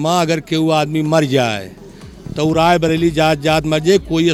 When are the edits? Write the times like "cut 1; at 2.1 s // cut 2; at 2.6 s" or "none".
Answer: none